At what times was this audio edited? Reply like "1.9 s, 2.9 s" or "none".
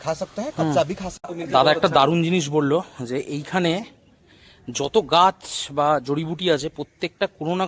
1.3 s